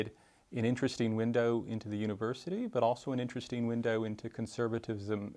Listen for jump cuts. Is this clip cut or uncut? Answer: uncut